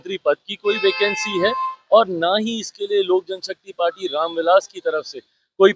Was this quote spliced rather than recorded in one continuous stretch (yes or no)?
no